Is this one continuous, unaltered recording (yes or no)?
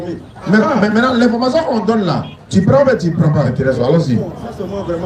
no